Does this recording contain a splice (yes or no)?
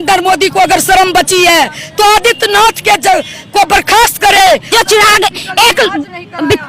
yes